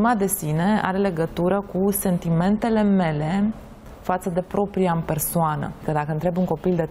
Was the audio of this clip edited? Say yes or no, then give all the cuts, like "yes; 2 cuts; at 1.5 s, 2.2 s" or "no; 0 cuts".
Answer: yes; 1 cut; at 5.8 s